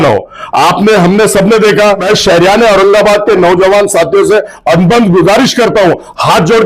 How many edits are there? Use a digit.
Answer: 1